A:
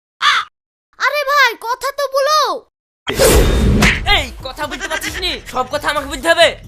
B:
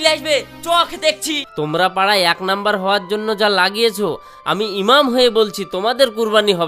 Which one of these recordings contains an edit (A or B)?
B